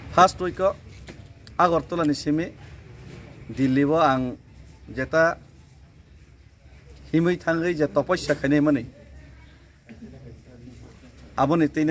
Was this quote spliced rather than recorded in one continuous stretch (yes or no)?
no